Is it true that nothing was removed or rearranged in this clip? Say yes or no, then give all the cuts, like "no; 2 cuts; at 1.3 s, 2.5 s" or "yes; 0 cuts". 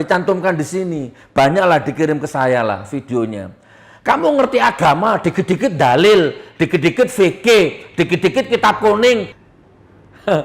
no; 1 cut; at 9.2 s